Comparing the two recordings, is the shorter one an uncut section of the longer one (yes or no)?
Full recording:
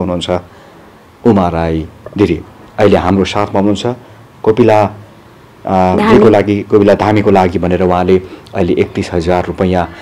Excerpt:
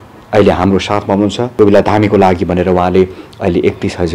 no